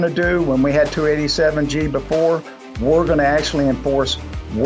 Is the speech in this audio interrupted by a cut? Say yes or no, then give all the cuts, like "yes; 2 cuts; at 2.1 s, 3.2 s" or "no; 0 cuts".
no; 0 cuts